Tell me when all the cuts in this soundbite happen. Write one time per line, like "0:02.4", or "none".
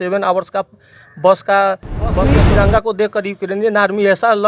0:02.3